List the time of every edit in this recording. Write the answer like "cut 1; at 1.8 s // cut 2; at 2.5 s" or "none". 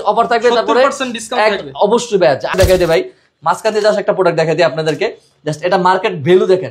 cut 1; at 2.5 s

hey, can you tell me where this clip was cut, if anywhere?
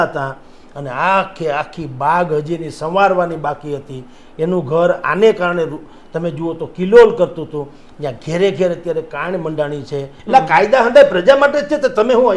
cut 1; at 10.2 s

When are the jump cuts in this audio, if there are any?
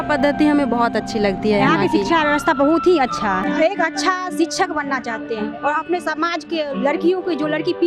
cut 1; at 3.4 s

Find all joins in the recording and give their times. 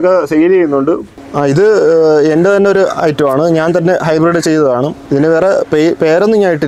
cut 1; at 1.2 s // cut 2; at 5.0 s

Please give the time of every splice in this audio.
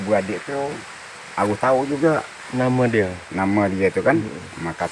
none

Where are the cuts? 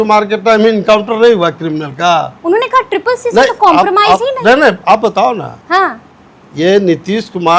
none

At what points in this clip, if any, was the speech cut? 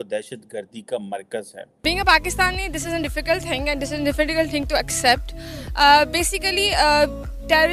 cut 1; at 1.6 s

